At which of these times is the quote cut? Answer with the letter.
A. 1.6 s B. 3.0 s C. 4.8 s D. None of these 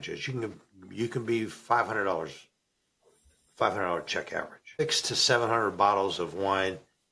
C